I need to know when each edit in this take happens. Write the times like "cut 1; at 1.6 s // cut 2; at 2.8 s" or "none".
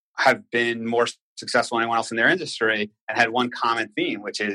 none